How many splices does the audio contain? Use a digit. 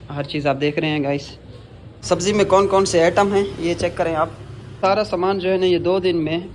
2